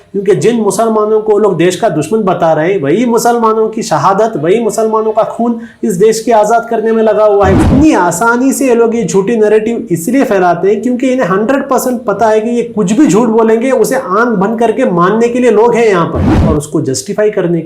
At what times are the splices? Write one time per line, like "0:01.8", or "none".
0:07.6
0:16.3